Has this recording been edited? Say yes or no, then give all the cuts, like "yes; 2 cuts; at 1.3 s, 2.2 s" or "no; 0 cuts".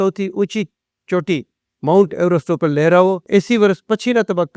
yes; 1 cut; at 3.2 s